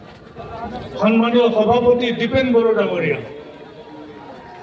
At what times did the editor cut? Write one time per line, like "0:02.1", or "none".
none